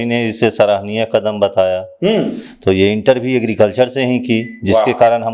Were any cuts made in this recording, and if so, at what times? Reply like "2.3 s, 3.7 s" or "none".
none